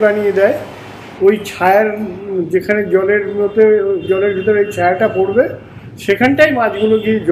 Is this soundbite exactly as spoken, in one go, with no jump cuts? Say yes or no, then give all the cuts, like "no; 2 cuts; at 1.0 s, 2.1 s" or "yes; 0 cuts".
no; 1 cut; at 0.9 s